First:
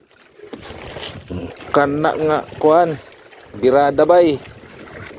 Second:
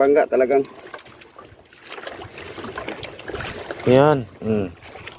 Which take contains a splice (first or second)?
first